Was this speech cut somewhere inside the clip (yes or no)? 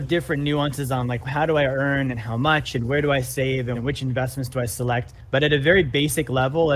yes